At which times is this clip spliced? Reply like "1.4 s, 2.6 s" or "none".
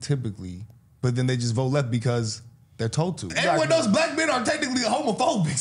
3.3 s